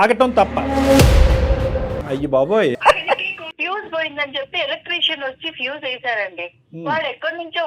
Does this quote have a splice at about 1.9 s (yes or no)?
yes